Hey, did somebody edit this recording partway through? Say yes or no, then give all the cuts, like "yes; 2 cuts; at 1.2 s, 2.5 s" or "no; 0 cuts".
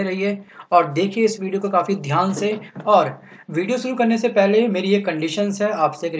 yes; 1 cut; at 1.9 s